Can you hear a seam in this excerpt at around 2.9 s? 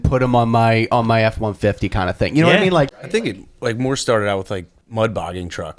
yes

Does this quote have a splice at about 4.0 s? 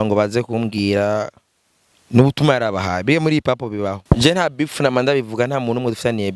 yes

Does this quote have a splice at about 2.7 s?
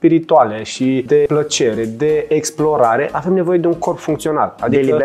no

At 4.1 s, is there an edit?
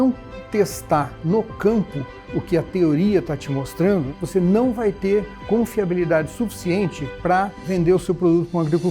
yes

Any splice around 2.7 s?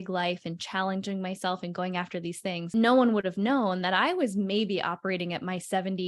yes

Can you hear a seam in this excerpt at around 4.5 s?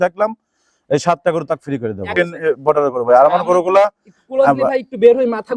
no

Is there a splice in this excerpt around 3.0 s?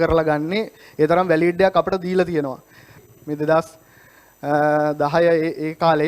yes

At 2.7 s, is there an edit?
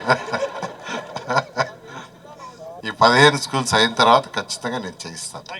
yes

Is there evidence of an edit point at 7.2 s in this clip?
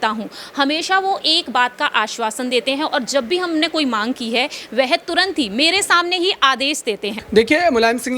yes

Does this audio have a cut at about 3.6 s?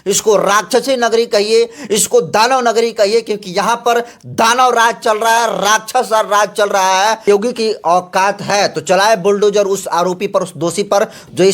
no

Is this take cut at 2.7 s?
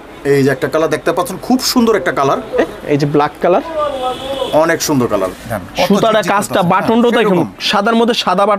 yes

